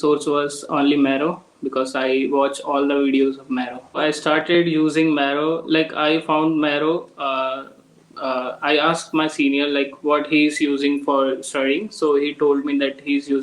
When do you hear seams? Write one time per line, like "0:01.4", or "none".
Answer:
0:04.0